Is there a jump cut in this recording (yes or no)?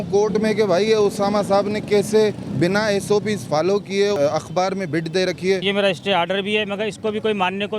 yes